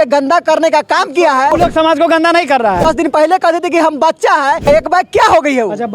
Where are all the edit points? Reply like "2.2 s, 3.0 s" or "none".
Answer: 1.5 s, 2.8 s, 4.6 s

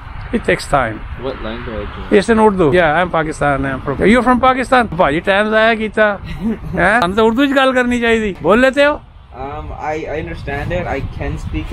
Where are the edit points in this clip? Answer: 2.7 s, 3.9 s, 5.0 s, 7.0 s, 8.3 s

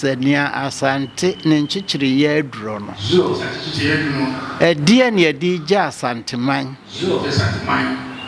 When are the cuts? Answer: none

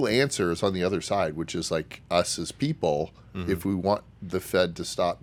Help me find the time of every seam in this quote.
none

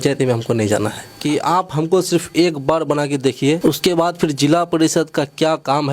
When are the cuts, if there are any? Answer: 1.1 s, 3.6 s

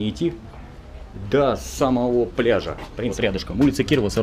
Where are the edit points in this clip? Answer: 3.1 s

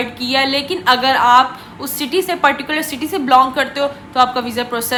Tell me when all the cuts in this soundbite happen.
none

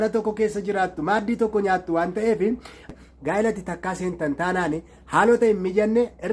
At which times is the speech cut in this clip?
2.9 s

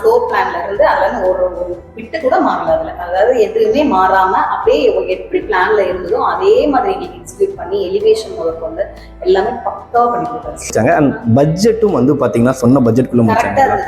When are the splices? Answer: 10.7 s

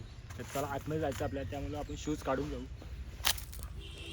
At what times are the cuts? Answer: none

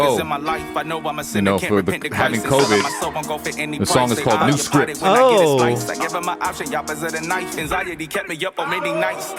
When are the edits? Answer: none

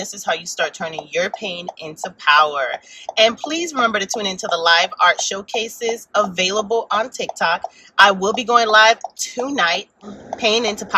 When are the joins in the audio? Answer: 10.0 s

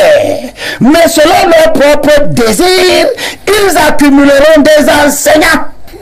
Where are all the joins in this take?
none

